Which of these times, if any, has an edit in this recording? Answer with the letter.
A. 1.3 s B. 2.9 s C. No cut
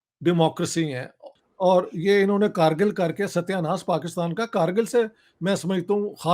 A